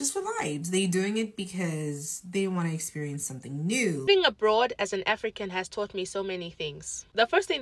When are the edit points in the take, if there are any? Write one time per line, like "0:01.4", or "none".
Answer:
0:04.1

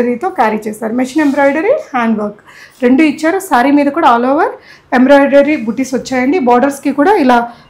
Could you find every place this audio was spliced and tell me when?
none

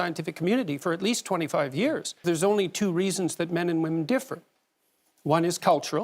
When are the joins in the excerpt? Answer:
0:02.2

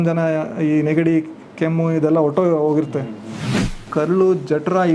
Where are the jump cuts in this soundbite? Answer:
0:03.7

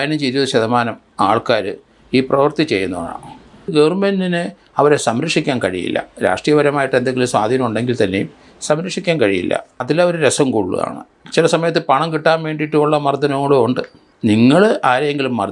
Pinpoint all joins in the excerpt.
0:03.7
0:09.8
0:14.1

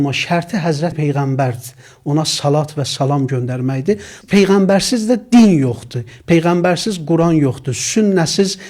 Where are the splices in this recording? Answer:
0:01.0
0:04.2

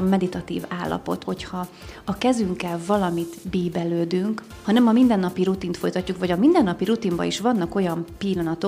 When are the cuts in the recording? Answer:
0:01.2
0:04.5

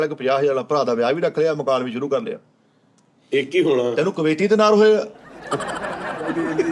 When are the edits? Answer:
none

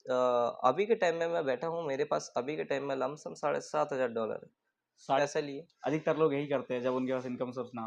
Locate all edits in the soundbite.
0:05.2

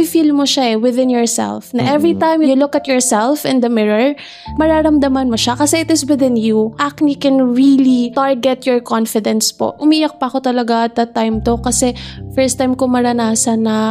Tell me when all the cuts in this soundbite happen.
0:02.5
0:04.4
0:06.8
0:08.1
0:09.8

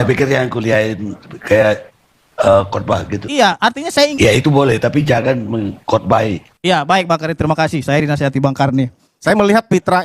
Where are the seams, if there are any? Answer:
0:04.1
0:09.1

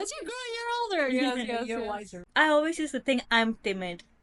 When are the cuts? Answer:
0:02.2

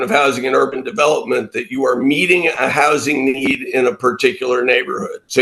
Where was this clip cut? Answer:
none

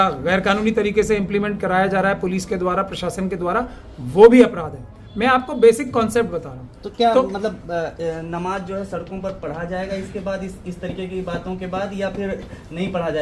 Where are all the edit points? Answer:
none

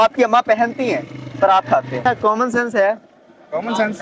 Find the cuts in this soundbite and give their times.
0:02.0

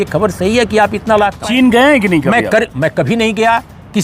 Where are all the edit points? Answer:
0:01.4

